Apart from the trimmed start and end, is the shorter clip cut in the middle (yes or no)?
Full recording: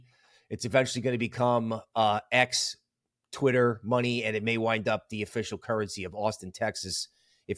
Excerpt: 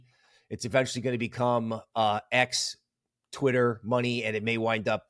no